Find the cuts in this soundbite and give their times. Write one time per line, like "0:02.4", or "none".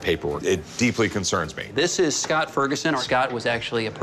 0:01.6
0:03.0